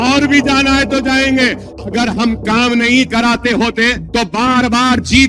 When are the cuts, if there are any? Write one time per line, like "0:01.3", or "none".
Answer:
0:01.7
0:04.0